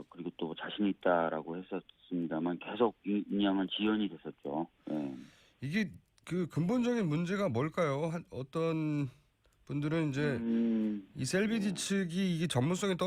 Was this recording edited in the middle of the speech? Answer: no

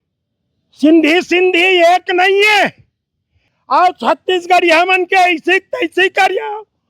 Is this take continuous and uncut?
no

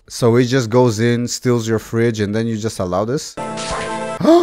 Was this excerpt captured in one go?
yes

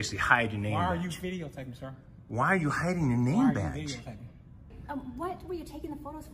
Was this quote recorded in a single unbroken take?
no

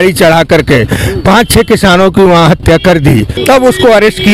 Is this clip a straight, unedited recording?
no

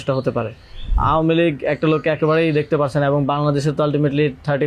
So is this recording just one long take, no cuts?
no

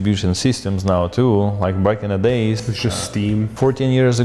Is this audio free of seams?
yes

